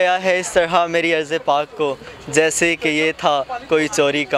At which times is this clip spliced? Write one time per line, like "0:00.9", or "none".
none